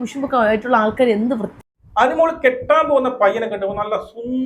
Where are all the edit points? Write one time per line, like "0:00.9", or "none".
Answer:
0:01.5